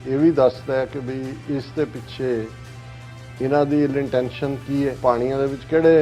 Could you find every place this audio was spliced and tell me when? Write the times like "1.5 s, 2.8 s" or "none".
5.0 s